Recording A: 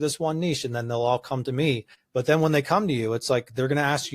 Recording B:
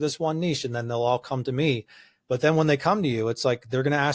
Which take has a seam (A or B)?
A